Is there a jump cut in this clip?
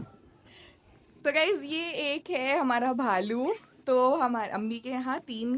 no; 0 cuts

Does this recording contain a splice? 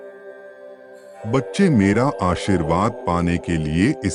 yes; 1 cut; at 1.2 s

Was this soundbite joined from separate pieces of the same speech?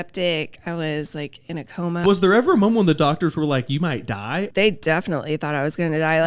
yes; 2 cuts; at 2.0 s, 4.5 s

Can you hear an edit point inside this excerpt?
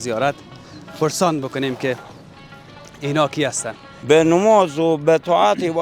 yes; 1 cut; at 3.9 s

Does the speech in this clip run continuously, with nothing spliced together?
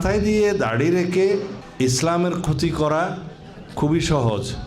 no; 1 cut; at 1.6 s

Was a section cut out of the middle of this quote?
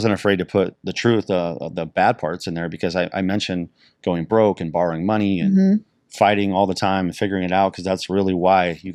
no; 0 cuts

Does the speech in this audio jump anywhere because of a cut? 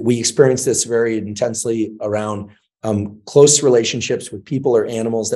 no; 0 cuts

